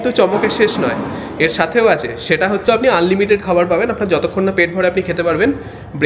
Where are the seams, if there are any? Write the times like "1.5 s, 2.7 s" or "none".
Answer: 2.1 s